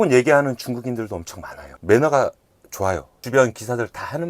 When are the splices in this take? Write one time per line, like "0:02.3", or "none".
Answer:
0:01.7
0:03.1